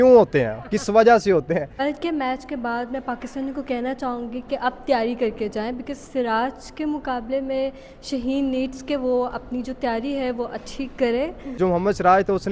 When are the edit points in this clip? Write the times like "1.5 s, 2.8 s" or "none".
1.7 s, 11.4 s